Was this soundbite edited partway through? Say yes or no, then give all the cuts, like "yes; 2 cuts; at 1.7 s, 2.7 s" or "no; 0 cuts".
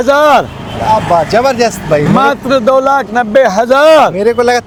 no; 0 cuts